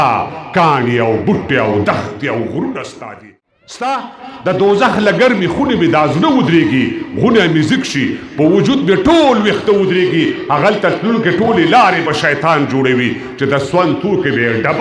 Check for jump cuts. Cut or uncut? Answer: cut